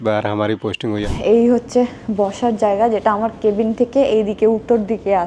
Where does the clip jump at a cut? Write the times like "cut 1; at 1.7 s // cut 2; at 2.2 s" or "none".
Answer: cut 1; at 1.1 s